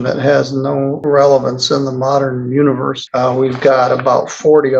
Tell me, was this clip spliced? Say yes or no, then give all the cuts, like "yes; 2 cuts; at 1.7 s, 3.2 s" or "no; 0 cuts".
yes; 2 cuts; at 1.0 s, 3.0 s